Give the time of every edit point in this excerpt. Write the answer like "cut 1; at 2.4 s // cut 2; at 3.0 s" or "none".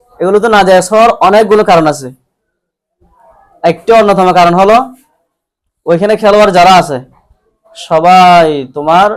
none